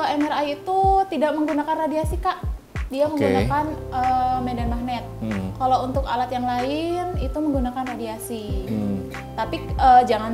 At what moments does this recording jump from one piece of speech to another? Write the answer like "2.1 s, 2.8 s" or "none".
none